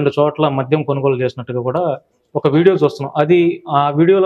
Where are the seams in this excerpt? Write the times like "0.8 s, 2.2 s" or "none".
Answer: none

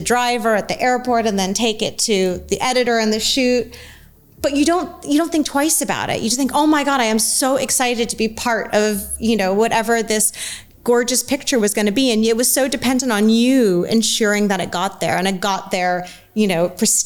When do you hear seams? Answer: none

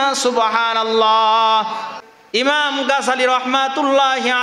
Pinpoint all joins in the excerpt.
1.9 s

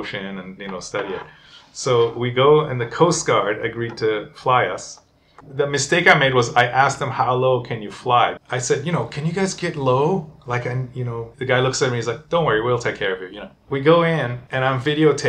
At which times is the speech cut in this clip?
5.4 s, 8.4 s, 11.3 s, 13.5 s, 14.4 s

